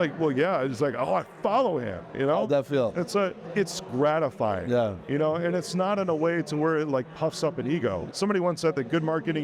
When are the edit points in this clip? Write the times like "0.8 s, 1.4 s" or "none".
3.4 s, 8.0 s